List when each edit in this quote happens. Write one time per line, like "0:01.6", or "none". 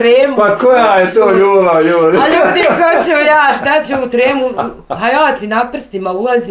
none